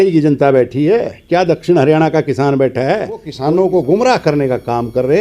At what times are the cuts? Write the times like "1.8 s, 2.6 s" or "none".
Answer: 3.3 s